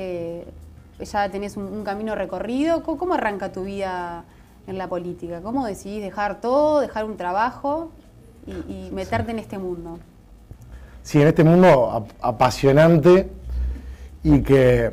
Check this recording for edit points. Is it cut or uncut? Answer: cut